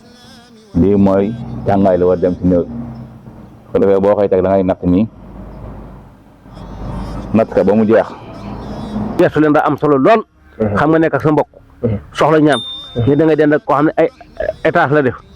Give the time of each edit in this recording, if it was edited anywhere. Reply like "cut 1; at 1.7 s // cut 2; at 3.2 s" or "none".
cut 1; at 9.1 s